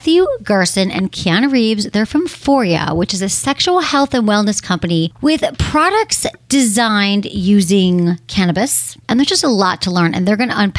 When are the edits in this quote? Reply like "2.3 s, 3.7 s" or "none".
5.1 s, 6.3 s, 9.0 s